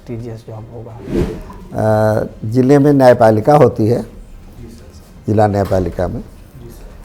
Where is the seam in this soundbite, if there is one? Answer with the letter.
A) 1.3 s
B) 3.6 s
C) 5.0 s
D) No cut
A